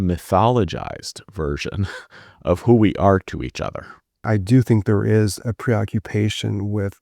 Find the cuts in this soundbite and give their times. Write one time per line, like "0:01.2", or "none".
0:04.3